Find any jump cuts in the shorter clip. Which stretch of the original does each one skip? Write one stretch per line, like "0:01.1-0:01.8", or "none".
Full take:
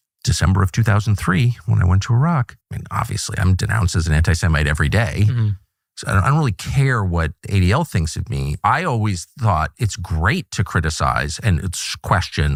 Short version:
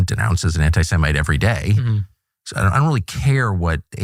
none